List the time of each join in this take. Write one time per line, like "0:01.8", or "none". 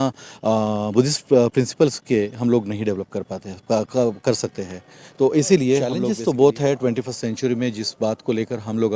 0:06.0